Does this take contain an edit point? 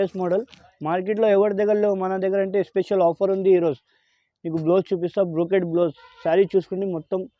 no; 0 cuts

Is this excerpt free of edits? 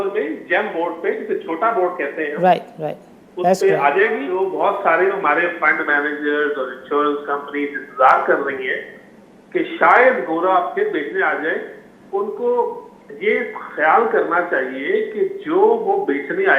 no; 1 cut; at 4.4 s

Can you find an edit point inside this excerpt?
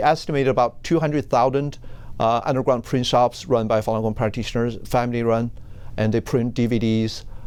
no; 0 cuts

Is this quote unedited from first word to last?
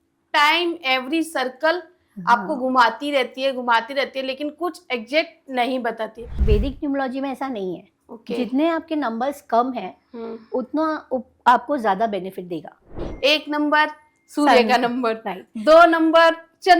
no; 2 cuts; at 6.4 s, 13.0 s

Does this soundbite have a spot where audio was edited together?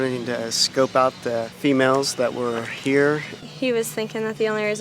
yes; 2 cuts; at 1.5 s, 3.5 s

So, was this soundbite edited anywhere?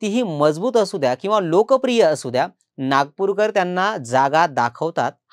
no; 0 cuts

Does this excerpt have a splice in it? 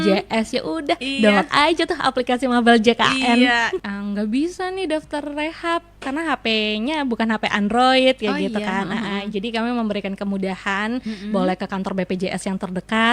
yes; 1 cut; at 3.8 s

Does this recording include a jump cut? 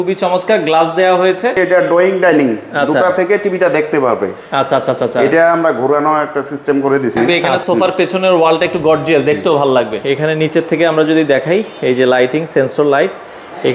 yes; 3 cuts; at 1.5 s, 7.5 s, 10.0 s

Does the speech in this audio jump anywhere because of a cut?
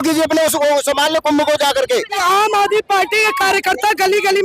yes; 1 cut; at 2.2 s

